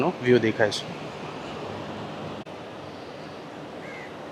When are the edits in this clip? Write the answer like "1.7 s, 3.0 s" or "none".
none